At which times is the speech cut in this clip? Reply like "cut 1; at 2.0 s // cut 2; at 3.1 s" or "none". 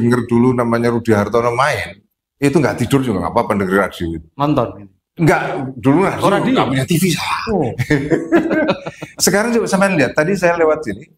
none